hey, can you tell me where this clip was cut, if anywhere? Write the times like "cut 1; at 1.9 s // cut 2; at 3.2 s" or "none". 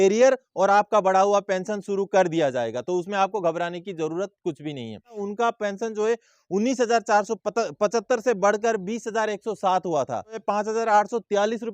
cut 1; at 5.2 s // cut 2; at 10.4 s